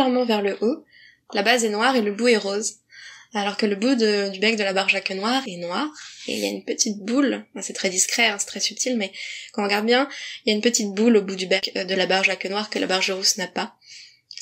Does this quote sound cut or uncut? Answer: uncut